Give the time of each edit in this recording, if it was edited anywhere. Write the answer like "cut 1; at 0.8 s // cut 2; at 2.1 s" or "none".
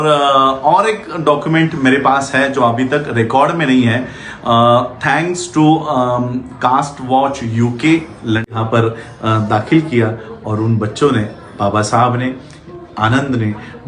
cut 1; at 8.5 s